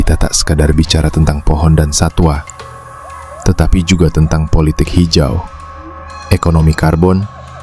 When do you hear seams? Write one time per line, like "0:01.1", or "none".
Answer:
none